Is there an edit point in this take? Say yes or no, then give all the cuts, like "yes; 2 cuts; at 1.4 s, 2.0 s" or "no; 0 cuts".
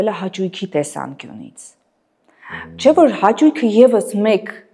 no; 0 cuts